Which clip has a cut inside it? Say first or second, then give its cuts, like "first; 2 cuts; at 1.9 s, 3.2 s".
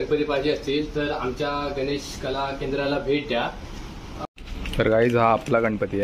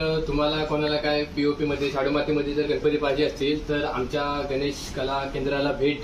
first; 1 cut; at 4.2 s